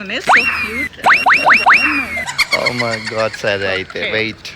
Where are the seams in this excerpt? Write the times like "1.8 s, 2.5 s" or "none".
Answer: none